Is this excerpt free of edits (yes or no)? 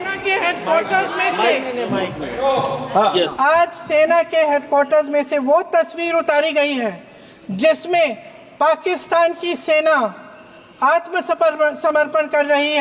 yes